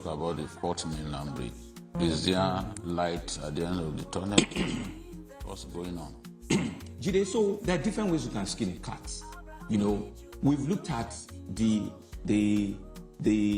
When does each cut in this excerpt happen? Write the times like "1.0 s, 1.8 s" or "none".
none